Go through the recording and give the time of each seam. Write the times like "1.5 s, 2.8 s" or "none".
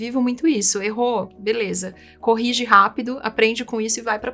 none